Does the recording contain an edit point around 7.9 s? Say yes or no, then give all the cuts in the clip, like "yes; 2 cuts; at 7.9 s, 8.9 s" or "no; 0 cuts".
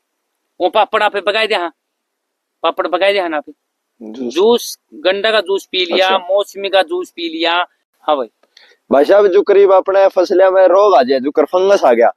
yes; 1 cut; at 7.9 s